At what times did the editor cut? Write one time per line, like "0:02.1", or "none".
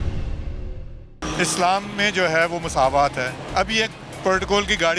0:01.2
0:03.4